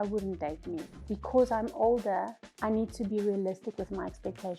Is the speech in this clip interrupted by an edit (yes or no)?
yes